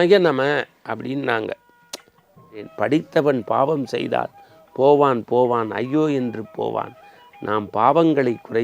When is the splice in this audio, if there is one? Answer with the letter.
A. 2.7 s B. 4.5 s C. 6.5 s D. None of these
A